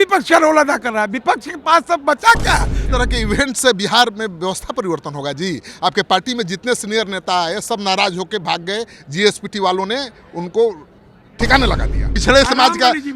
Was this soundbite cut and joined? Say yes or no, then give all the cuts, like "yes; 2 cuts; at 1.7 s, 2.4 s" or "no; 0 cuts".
yes; 2 cuts; at 2.8 s, 12.1 s